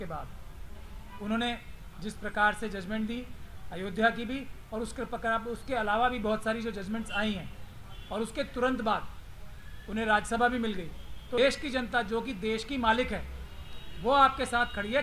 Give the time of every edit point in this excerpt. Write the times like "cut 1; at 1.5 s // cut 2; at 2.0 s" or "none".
cut 1; at 11.4 s